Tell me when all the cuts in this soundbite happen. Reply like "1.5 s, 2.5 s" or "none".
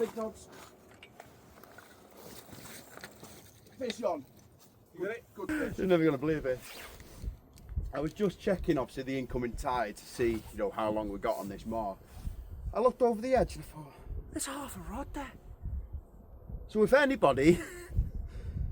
5.5 s